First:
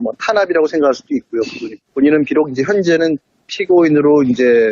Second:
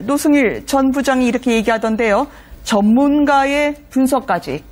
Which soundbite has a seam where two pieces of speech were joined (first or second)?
first